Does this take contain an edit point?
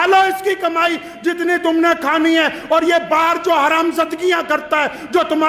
no; 0 cuts

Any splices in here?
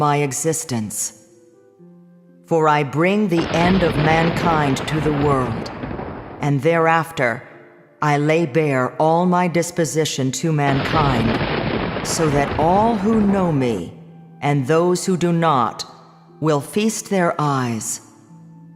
yes; 1 cut; at 7.1 s

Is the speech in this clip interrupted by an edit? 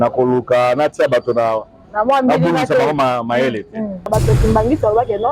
yes; 1 cut; at 4.1 s

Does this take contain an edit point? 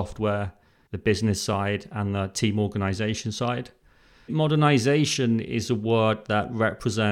yes; 1 cut; at 4.3 s

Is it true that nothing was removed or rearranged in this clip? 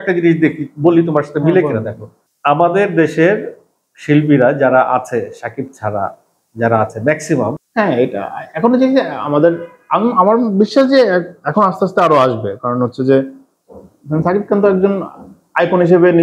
no; 1 cut; at 7.6 s

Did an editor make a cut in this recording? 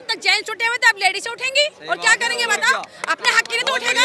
no; 0 cuts

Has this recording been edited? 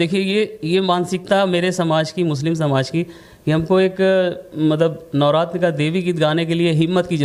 no; 0 cuts

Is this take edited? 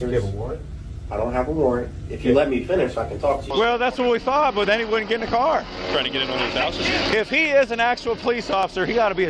yes; 1 cut; at 3.4 s

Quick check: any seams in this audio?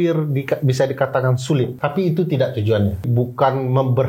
yes; 2 cuts; at 1.8 s, 3.1 s

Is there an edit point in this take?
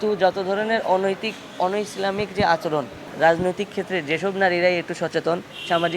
yes; 1 cut; at 3.0 s

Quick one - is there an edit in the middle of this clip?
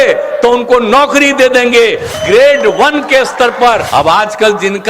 yes; 2 cuts; at 2.1 s, 3.8 s

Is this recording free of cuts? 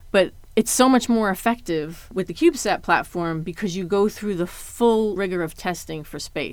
no; 2 cuts; at 2.1 s, 5.2 s

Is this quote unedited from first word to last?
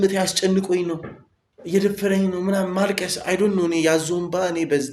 yes; 0 cuts

